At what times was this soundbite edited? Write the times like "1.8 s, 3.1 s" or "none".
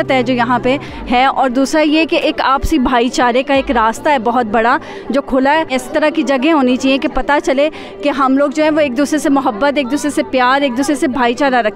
5.8 s